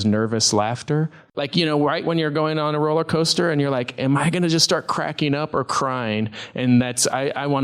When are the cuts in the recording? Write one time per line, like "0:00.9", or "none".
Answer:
0:01.2